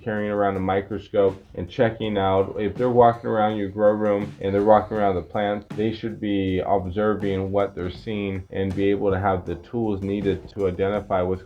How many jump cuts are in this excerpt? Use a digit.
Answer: 1